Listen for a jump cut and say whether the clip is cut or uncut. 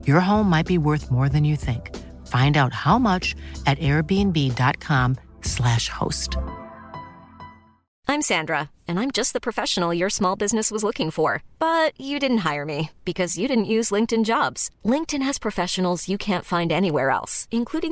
cut